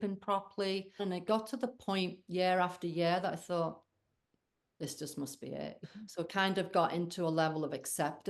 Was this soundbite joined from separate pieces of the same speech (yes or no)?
yes